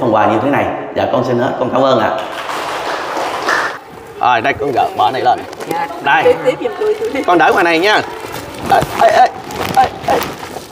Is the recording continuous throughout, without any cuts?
no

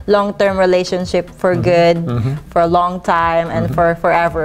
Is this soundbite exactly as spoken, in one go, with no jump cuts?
yes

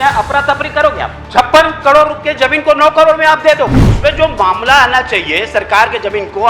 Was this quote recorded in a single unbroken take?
no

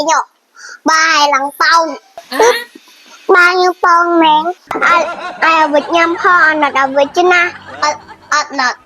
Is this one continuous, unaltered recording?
no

